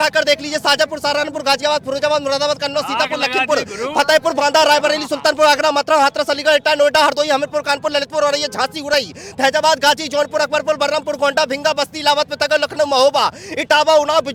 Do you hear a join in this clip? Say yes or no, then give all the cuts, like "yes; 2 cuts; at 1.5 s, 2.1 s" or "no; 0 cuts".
no; 0 cuts